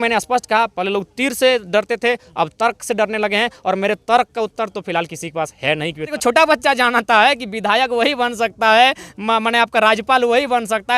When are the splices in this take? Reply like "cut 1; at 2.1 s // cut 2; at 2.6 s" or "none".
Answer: cut 1; at 6.1 s